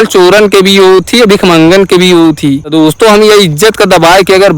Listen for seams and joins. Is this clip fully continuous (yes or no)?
no